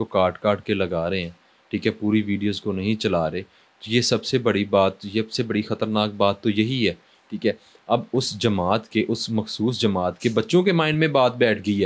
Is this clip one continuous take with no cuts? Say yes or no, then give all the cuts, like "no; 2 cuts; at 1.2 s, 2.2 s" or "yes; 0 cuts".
yes; 0 cuts